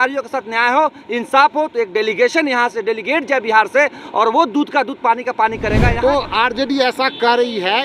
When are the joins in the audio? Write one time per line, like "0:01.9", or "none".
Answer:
0:05.9